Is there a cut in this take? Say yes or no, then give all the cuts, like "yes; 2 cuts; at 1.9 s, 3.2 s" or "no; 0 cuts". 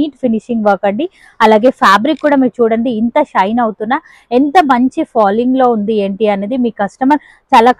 no; 0 cuts